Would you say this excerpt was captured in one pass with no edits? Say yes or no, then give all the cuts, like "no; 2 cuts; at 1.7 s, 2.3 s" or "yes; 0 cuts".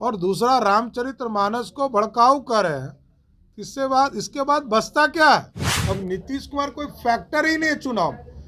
no; 1 cut; at 5.8 s